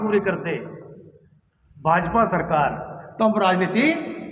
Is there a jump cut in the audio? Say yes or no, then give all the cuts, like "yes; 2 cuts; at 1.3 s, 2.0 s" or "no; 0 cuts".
no; 0 cuts